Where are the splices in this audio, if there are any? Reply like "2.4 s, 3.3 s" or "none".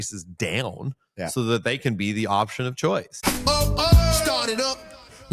3.2 s